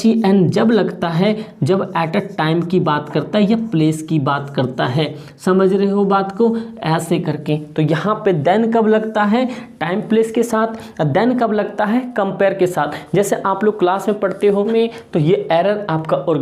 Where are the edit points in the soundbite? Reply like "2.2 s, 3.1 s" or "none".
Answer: 14.6 s